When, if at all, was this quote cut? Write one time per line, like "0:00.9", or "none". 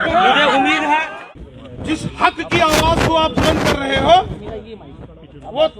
0:01.1